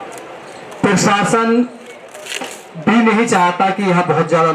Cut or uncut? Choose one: uncut